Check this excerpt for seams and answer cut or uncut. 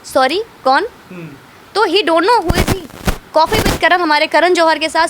uncut